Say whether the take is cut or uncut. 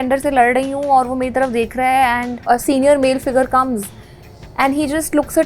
cut